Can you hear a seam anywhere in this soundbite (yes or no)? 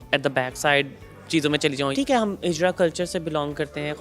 yes